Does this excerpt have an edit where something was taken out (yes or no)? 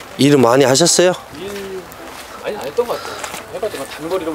yes